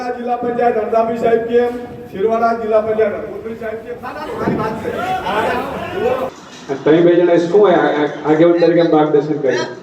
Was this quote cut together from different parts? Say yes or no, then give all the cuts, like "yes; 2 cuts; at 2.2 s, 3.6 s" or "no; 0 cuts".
yes; 1 cut; at 6.3 s